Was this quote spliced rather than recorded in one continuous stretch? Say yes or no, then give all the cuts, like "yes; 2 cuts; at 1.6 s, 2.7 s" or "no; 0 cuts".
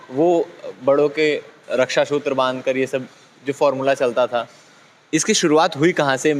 no; 0 cuts